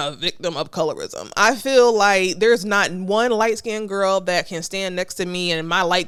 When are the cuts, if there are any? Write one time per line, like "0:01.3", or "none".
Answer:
none